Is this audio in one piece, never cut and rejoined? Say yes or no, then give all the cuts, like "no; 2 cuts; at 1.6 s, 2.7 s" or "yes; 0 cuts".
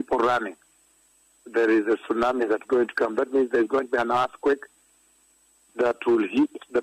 no; 1 cut; at 1.1 s